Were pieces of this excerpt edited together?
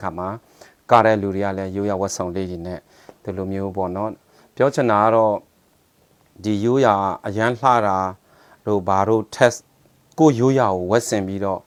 no; 0 cuts

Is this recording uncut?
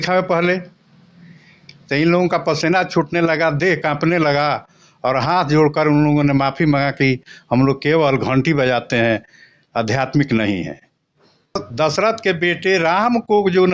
no; 1 cut; at 11.7 s

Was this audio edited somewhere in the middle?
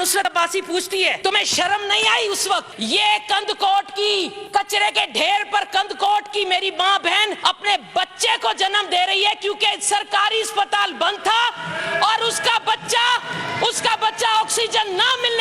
yes; 4 cuts; at 1.2 s, 2.7 s, 4.4 s, 7.4 s

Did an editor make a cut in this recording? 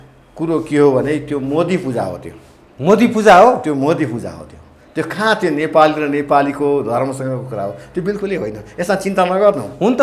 no; 0 cuts

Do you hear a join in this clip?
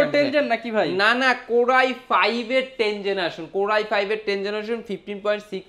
no; 0 cuts

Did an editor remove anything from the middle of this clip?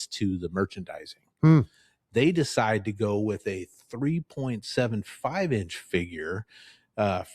no; 0 cuts

